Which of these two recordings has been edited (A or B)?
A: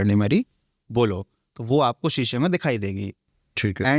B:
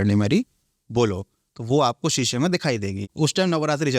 B